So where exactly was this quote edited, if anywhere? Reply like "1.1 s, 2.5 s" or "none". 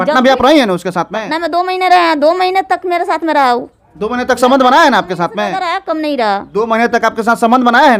none